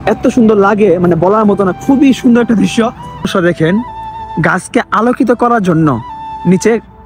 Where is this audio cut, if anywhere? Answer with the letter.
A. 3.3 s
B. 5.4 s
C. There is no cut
A